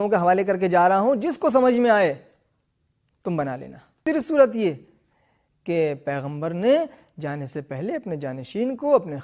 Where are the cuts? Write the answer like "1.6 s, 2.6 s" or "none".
4.0 s